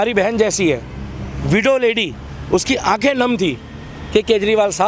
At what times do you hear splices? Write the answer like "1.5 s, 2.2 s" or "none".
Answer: none